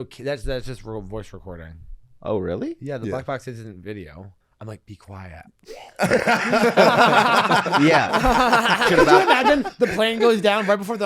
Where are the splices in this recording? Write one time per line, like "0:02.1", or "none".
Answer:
0:04.4
0:08.9